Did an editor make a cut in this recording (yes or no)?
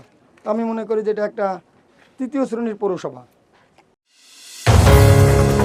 no